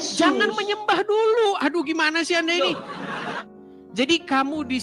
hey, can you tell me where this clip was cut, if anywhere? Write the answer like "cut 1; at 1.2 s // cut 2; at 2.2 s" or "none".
cut 1; at 3.4 s

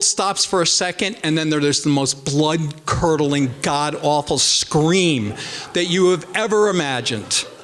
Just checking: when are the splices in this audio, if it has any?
none

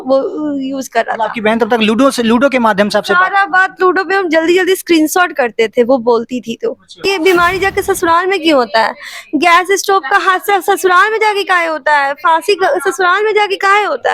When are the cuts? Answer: cut 1; at 7.0 s

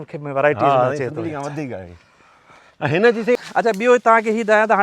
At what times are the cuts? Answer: cut 1; at 3.3 s

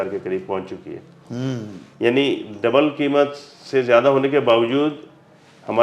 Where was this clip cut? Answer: none

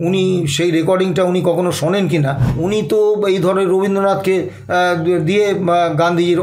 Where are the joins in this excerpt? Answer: cut 1; at 2.4 s

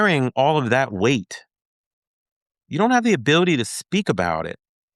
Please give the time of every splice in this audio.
none

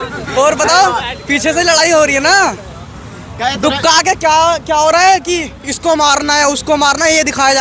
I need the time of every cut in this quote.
none

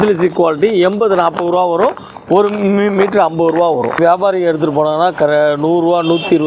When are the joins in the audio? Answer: cut 1; at 4.0 s

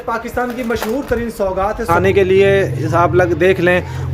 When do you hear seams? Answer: cut 1; at 1.9 s

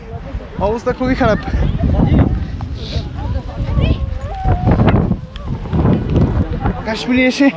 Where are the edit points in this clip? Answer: none

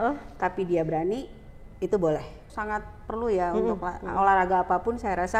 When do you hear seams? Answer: cut 1; at 2.5 s

